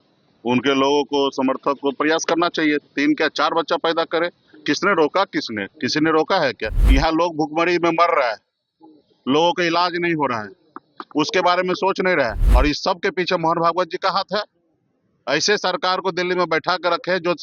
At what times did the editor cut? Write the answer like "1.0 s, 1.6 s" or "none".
6.7 s, 12.4 s